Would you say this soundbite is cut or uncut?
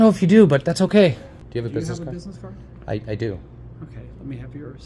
cut